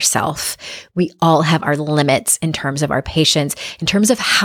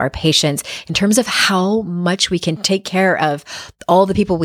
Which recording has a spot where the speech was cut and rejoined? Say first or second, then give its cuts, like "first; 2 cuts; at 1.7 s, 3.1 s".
second; 1 cut; at 2.6 s